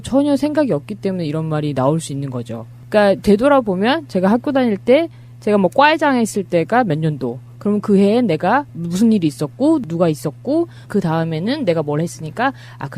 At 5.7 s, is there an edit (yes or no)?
yes